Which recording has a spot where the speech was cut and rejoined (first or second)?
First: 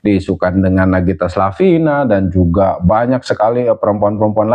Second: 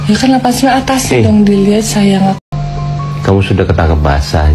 second